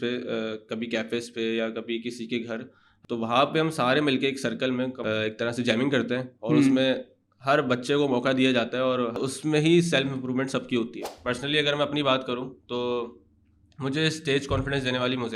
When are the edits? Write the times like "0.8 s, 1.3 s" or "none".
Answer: 2.8 s, 5.0 s, 9.2 s, 11.1 s